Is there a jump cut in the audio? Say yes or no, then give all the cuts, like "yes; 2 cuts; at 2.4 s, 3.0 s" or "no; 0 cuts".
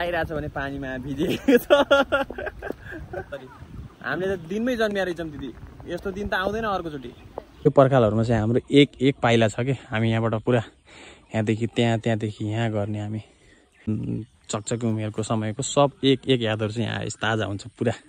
yes; 3 cuts; at 3.3 s, 7.7 s, 13.9 s